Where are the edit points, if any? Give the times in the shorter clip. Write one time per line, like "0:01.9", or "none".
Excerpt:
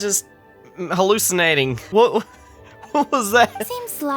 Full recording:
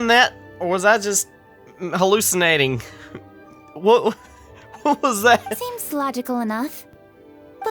0:01.8